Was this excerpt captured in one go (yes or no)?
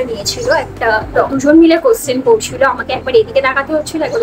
no